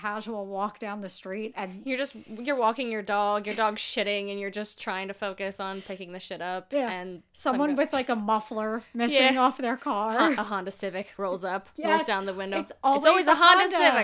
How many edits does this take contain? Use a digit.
0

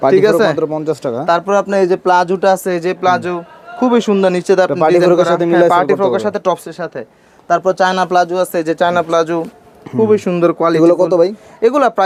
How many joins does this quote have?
0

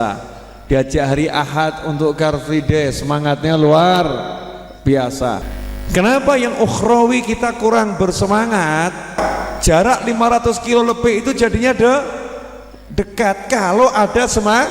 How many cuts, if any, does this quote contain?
2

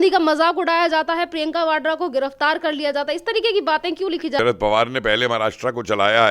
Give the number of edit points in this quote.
1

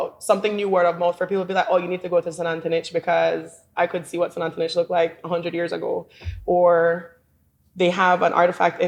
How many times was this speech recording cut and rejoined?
0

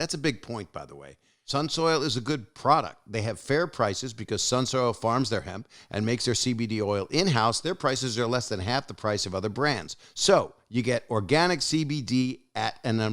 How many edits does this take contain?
1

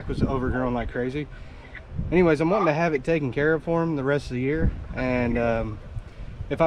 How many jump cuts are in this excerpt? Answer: 0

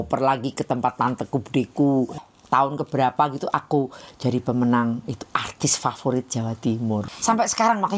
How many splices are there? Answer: 2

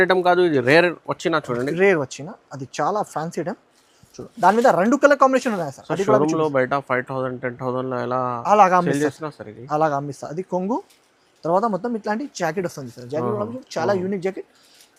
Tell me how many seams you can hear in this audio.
0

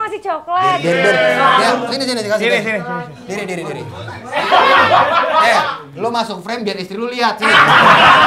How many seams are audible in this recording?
0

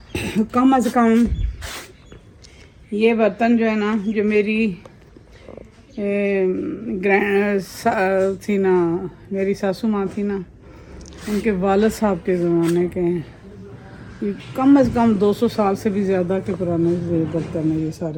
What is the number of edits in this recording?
0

